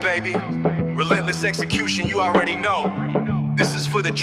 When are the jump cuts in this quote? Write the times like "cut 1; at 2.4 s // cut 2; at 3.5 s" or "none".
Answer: none

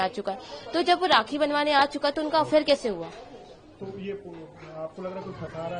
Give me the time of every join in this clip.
none

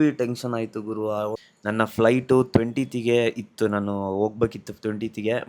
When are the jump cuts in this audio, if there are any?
cut 1; at 1.4 s

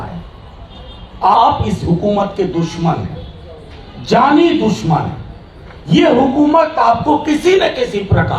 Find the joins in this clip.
cut 1; at 1.2 s

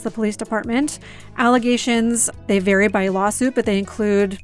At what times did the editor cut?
cut 1; at 2.4 s

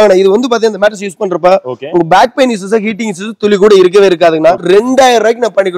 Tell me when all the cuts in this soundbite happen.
cut 1; at 4.6 s

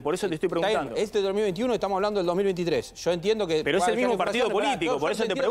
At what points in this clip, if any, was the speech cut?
none

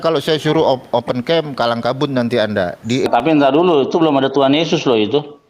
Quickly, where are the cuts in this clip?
cut 1; at 3.1 s

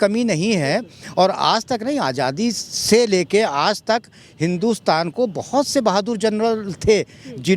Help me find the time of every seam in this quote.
none

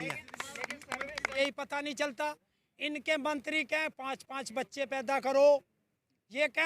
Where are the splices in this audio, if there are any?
cut 1; at 1.3 s

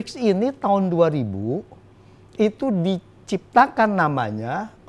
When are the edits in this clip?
none

